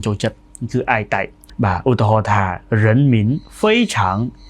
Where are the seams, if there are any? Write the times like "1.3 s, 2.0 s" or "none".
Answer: 1.4 s